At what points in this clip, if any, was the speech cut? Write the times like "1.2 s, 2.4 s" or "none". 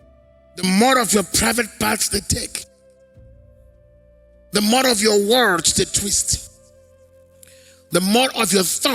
2.6 s, 4.5 s, 6.4 s, 7.9 s